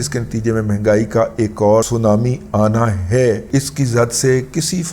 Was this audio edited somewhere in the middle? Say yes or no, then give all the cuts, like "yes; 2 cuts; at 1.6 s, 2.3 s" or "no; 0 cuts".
yes; 2 cuts; at 1.9 s, 3.4 s